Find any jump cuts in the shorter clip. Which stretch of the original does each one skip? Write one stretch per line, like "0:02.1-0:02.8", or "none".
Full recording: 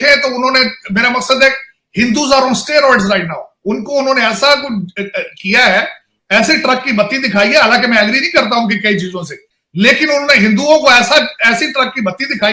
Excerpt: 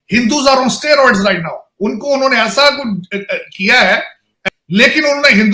0:06.1-0:09.3